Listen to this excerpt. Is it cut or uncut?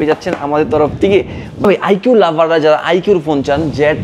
uncut